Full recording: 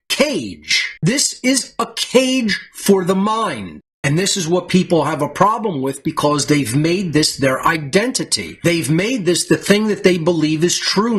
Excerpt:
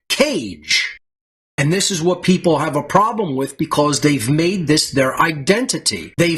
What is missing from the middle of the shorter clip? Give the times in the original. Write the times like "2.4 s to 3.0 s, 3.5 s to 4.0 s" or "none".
1.0 s to 3.5 s